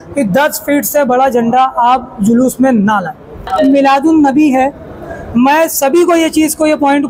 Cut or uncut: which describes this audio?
cut